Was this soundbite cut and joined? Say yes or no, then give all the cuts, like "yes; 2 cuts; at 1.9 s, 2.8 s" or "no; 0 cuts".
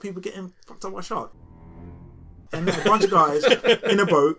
no; 0 cuts